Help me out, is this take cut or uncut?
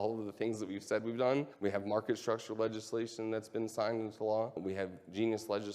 cut